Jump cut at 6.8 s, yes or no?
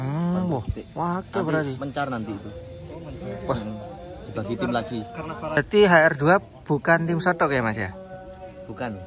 no